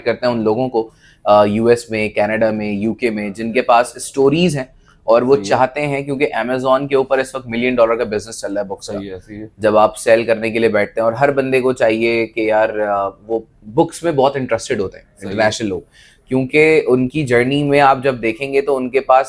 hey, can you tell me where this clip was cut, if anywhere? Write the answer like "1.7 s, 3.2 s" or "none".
none